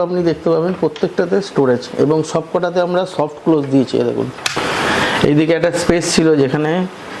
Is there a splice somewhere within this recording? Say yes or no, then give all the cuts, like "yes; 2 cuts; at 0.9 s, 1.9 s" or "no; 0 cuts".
yes; 1 cut; at 4.5 s